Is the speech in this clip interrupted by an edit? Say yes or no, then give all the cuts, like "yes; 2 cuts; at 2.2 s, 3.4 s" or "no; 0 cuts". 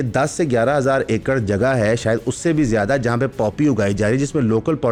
no; 0 cuts